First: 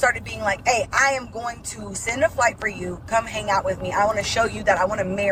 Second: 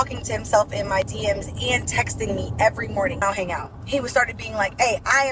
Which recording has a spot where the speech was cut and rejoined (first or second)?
second